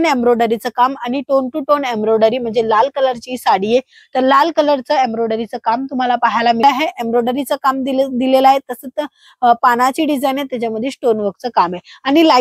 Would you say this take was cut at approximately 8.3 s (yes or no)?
no